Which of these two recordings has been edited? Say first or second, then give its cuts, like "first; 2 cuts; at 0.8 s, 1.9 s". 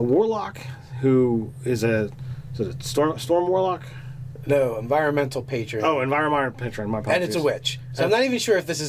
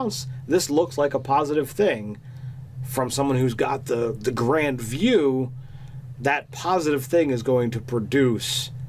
first; 1 cut; at 7.8 s